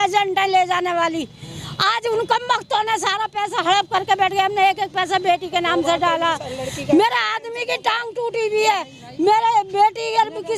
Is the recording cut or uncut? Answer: uncut